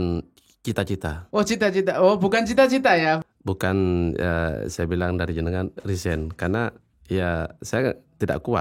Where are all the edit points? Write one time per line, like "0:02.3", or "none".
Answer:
0:03.2